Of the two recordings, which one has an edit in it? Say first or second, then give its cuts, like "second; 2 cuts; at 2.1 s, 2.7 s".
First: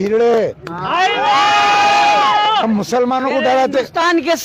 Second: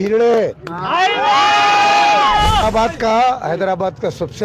second; 1 cut; at 2.6 s